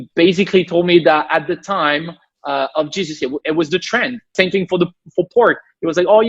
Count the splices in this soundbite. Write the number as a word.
one